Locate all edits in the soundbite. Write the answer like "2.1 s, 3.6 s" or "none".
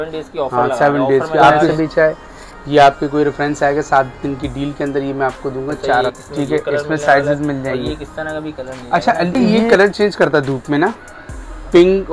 1.7 s, 6.1 s, 9.4 s